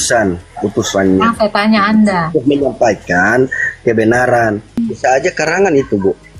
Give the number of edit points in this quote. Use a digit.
1